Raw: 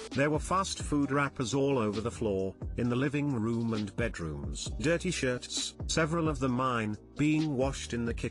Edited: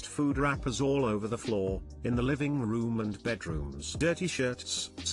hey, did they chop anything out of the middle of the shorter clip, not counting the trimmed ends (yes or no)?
yes